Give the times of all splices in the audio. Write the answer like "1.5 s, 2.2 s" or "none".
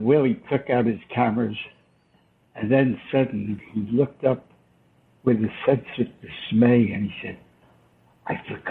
none